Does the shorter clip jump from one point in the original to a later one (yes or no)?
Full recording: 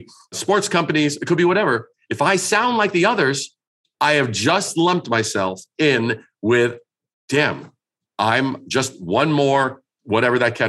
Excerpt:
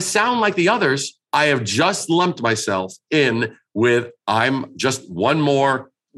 yes